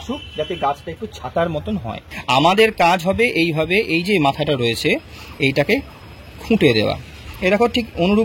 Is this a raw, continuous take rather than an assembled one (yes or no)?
no